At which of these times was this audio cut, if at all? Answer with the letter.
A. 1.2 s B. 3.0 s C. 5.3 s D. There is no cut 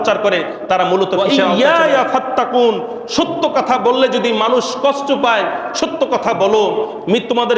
A